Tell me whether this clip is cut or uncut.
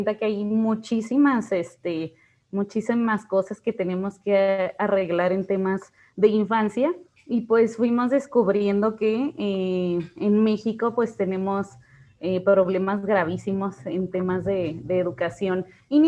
uncut